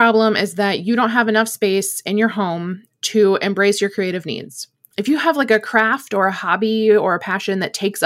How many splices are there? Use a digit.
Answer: 0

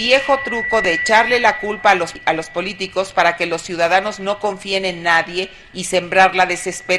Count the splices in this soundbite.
1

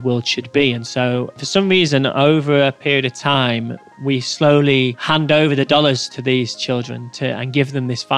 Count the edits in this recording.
1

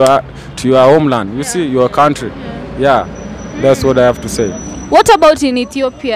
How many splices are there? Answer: 0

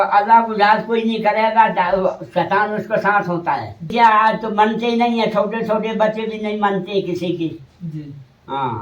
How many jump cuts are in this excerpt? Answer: 1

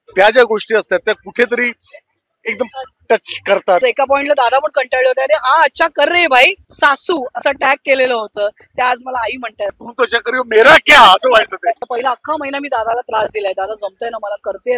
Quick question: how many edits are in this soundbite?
4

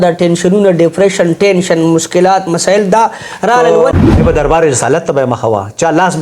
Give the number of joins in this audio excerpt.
1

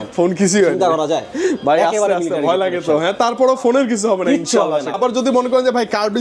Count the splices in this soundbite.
1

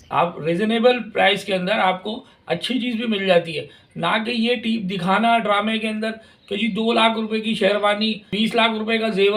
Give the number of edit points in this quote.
1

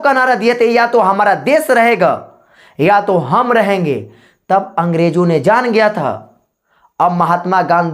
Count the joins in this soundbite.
0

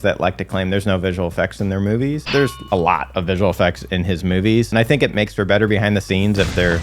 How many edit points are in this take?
2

